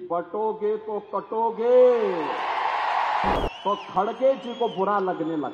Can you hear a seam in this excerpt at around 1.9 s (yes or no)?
no